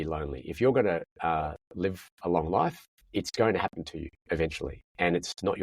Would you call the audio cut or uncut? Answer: uncut